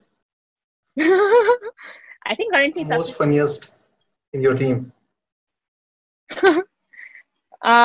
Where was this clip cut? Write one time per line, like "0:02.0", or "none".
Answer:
0:03.0